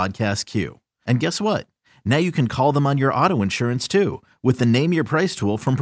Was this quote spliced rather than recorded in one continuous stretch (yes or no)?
no